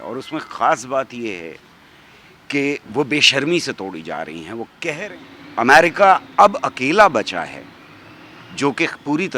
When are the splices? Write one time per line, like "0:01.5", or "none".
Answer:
0:05.0